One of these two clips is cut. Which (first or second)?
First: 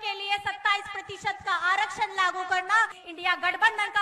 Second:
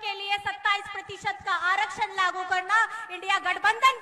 first